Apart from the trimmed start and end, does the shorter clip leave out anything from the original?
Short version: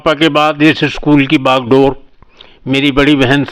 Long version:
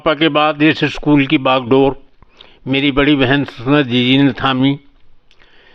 no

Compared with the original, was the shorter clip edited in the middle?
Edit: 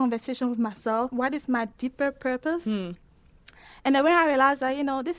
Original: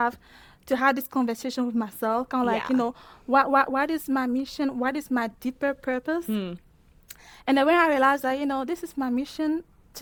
yes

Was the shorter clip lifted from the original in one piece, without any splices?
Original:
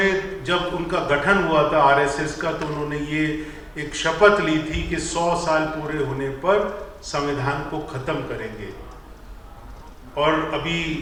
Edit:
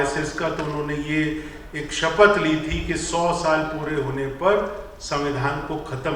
yes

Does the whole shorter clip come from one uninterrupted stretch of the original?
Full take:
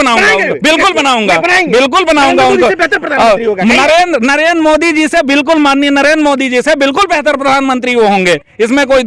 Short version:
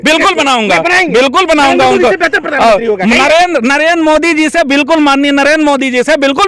yes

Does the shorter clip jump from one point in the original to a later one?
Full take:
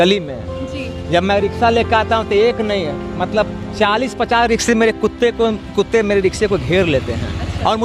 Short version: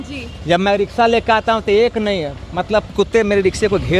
yes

